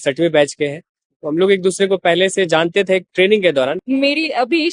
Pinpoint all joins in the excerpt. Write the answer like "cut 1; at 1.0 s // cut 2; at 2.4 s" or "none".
cut 1; at 3.8 s